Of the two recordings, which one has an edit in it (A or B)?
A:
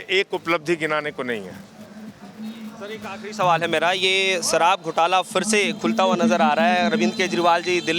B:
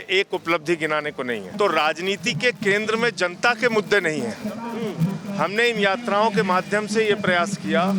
B